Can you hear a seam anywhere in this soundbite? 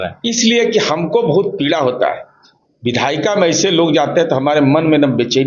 no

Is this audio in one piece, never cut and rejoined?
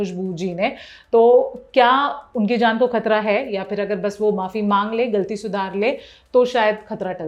yes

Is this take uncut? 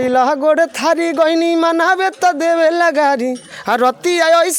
yes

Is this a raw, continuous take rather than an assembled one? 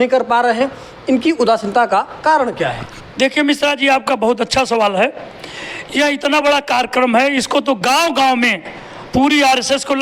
yes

